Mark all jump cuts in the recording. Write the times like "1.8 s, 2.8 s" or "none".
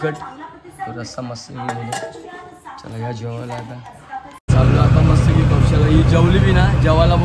4.3 s